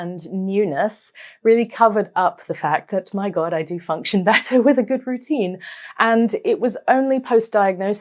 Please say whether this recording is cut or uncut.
uncut